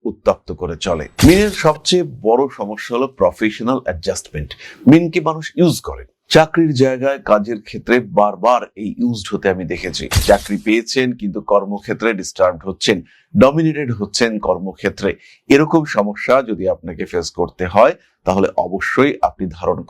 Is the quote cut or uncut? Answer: cut